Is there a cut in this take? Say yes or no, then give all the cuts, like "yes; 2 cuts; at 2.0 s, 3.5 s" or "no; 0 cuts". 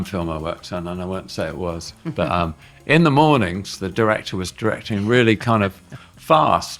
no; 0 cuts